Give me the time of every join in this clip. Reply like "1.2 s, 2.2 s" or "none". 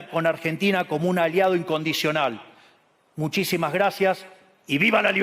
none